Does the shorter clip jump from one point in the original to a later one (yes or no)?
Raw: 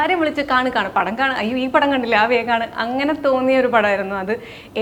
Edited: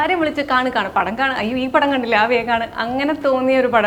no